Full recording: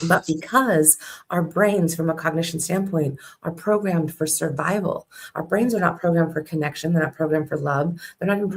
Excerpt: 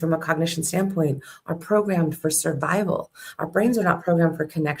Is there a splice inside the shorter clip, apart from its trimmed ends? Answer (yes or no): no